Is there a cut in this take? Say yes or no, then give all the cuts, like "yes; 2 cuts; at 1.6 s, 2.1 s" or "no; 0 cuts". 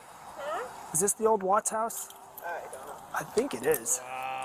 no; 0 cuts